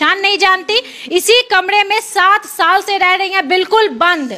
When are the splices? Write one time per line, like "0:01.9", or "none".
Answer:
none